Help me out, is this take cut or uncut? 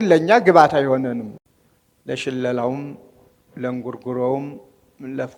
cut